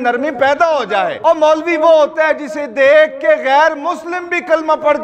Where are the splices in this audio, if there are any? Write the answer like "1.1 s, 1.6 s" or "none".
1.1 s